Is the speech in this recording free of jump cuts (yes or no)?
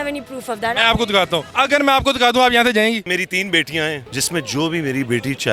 no